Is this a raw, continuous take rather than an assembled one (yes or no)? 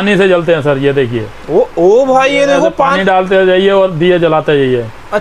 yes